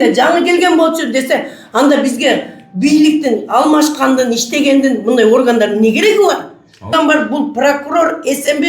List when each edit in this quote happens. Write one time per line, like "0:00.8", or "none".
0:06.9